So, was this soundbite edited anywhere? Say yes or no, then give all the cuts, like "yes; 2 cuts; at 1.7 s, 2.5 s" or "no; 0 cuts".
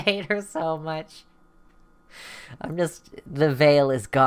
no; 0 cuts